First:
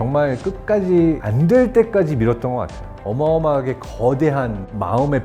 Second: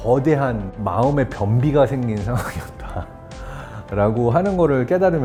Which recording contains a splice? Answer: first; 1 cut; at 3.0 s

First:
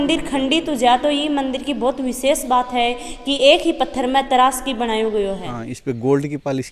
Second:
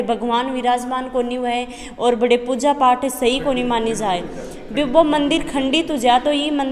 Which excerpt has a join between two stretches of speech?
first; 1 cut; at 5.6 s

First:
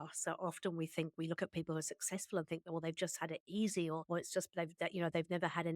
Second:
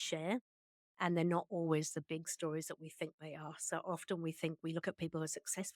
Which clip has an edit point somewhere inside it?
first; 1 cut; at 4.0 s

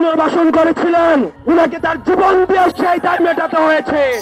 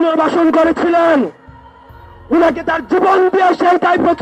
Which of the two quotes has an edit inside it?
first; 2 cuts; at 1.3 s, 2.7 s

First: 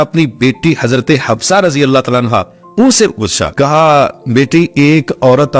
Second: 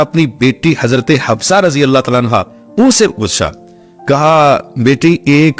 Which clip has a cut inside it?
first; 1 cut; at 3.4 s

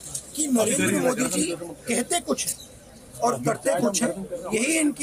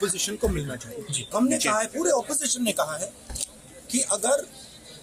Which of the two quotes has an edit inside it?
second; 1 cut; at 1.3 s

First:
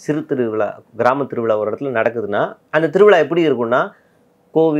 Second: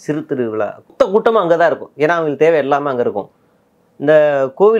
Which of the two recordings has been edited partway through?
second; 1 cut; at 0.9 s

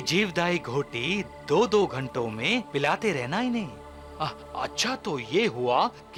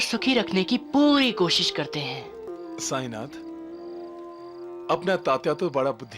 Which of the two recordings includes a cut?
second; 1 cut; at 2.5 s

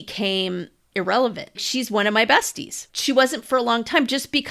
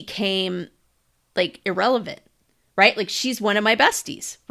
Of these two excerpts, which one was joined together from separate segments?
first; 3 cuts; at 0.9 s, 1.6 s, 2.9 s

